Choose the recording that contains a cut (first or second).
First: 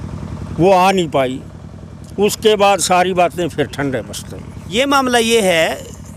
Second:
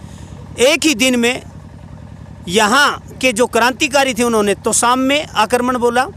first